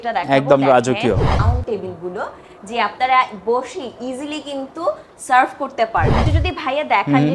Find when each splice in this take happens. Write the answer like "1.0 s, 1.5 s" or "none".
1.4 s, 6.3 s